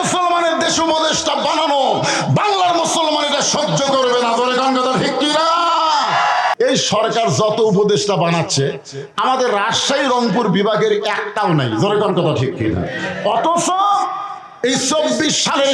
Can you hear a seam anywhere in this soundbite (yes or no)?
yes